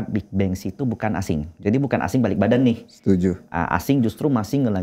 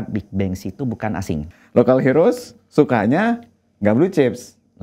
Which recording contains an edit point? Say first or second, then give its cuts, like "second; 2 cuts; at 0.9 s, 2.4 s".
second; 1 cut; at 1.5 s